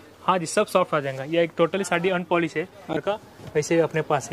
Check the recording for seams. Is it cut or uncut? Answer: cut